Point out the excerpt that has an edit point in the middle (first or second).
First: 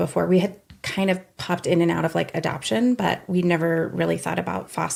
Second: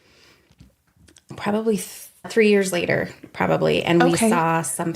second